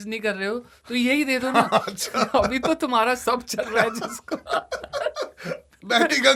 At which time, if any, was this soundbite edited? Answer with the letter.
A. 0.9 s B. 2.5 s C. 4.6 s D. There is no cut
D